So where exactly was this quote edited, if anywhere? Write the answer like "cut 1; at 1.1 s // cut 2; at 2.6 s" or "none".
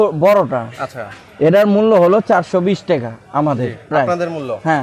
none